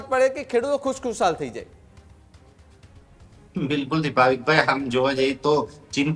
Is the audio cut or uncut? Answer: uncut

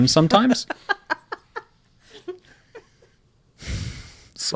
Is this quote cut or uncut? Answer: uncut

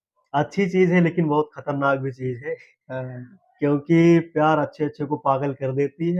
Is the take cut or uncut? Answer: uncut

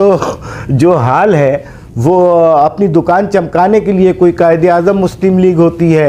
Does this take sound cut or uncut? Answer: uncut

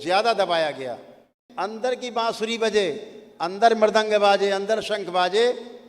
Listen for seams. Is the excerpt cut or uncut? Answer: cut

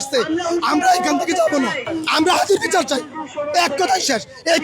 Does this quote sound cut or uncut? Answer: cut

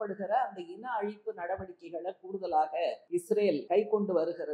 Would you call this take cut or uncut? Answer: cut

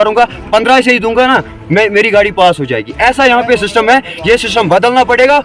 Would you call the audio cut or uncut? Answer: uncut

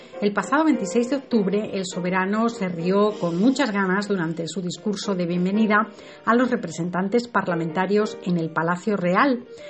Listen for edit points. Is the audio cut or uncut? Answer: uncut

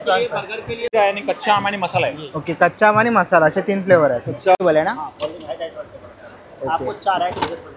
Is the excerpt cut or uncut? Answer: cut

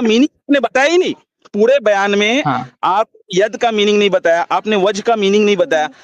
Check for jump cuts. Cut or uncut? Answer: uncut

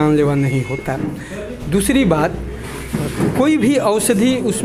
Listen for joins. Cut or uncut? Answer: uncut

